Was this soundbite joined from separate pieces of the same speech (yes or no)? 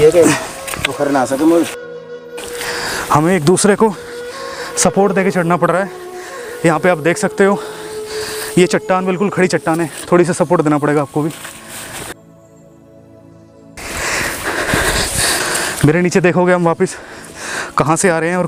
no